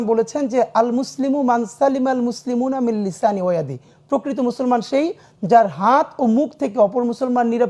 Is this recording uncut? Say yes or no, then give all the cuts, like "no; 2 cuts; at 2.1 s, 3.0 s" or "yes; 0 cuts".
yes; 0 cuts